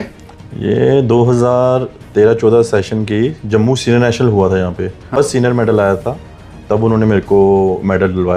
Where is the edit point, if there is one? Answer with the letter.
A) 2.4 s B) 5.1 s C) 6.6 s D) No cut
B